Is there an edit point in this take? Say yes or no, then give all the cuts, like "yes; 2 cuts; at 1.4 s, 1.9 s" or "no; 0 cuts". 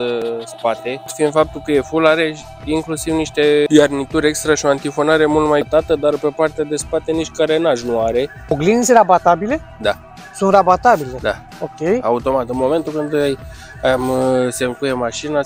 yes; 4 cuts; at 1.1 s, 3.7 s, 5.7 s, 8.5 s